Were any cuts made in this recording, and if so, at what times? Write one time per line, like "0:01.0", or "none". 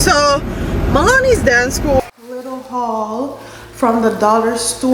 0:02.0